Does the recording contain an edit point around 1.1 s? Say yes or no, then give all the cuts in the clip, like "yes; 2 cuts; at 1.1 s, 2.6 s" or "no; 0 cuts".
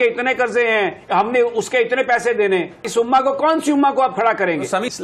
no; 1 cut; at 2.8 s